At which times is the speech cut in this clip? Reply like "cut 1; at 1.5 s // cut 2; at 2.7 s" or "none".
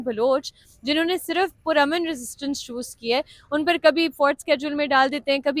none

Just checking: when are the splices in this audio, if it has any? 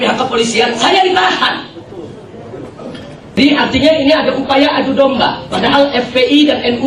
cut 1; at 3.4 s

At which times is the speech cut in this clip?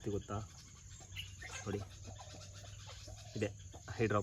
none

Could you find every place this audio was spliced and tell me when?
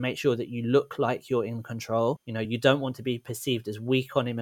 none

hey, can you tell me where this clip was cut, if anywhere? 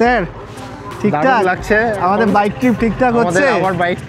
none

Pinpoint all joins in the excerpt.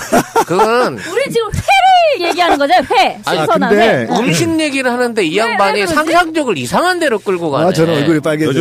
cut 1; at 4.6 s

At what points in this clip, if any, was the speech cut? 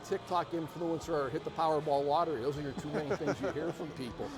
none

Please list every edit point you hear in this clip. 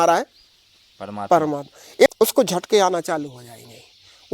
cut 1; at 2.1 s

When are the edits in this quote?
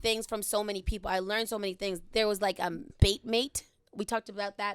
cut 1; at 2.9 s

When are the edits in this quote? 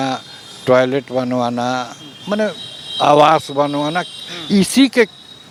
none

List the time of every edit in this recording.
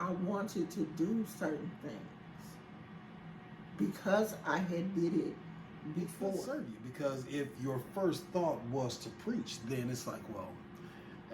cut 1; at 6.6 s

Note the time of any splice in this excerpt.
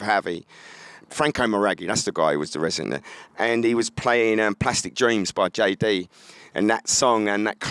cut 1; at 1.0 s

